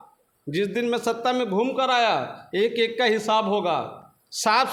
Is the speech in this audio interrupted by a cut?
no; 0 cuts

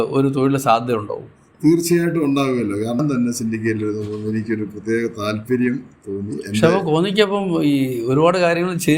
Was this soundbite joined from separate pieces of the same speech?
yes; 1 cut; at 3.0 s

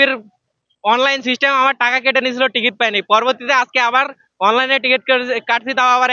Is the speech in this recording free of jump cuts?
yes; 0 cuts

